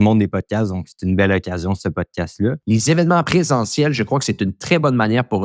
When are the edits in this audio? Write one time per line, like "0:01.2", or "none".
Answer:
0:02.6
0:03.3